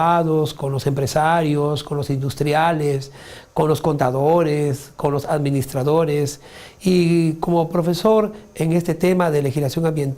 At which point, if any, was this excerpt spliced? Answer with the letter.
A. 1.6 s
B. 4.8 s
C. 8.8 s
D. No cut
A